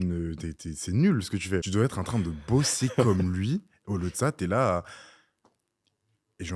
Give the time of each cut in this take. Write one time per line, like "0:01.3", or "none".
0:01.7